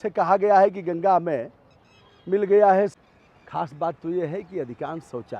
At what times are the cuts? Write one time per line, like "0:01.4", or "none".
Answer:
0:03.0